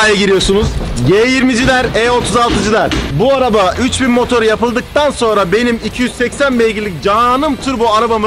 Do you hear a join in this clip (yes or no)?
no